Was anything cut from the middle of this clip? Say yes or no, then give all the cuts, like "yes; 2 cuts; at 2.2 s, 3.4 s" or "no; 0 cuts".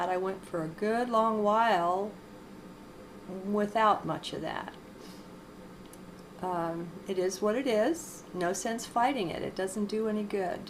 no; 0 cuts